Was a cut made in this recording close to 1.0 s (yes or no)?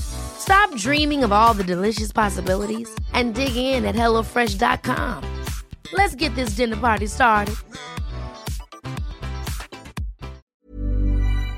no